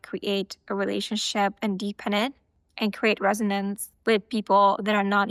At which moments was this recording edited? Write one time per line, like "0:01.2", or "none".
none